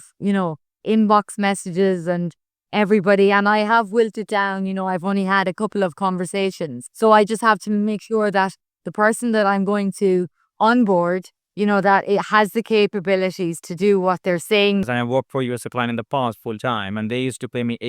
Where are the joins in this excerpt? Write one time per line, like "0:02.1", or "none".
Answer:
0:14.9